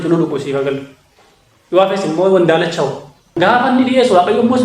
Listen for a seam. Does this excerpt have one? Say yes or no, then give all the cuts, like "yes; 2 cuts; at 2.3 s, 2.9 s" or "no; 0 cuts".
yes; 1 cut; at 3.4 s